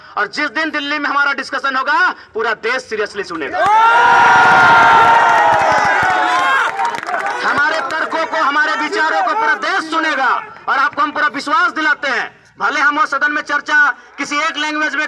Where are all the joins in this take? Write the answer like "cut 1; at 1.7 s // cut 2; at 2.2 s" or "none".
none